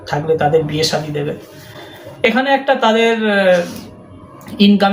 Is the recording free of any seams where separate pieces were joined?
yes; 0 cuts

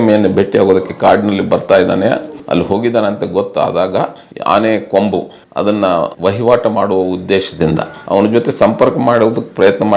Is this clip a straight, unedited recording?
no; 3 cuts; at 2.3 s, 4.3 s, 6.1 s

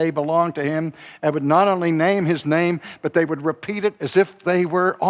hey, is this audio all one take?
yes; 0 cuts

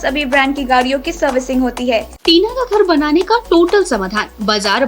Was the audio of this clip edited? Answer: yes; 1 cut; at 2.1 s

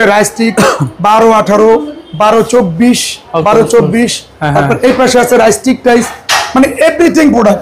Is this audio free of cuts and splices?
yes; 0 cuts

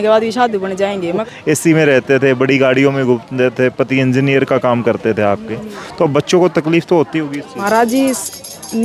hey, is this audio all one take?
no; 2 cuts; at 1.2 s, 7.6 s

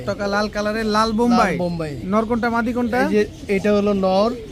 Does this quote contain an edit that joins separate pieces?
no; 0 cuts

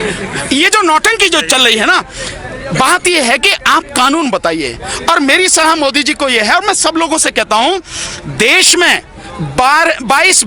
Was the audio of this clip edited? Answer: no; 0 cuts

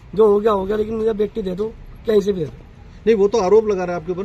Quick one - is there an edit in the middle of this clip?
no; 0 cuts

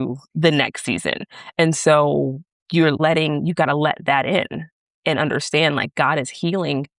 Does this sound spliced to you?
yes; 1 cut; at 3.0 s

